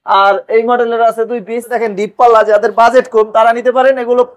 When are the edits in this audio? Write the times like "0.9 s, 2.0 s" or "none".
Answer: 1.8 s